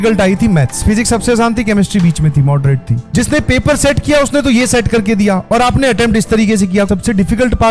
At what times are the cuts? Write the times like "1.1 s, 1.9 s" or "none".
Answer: 0.8 s, 3.0 s, 6.9 s